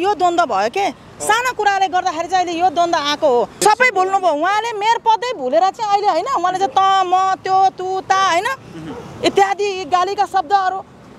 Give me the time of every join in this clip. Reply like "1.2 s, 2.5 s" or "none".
3.6 s